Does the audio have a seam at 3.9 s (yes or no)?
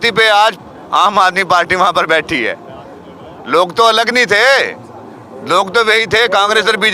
no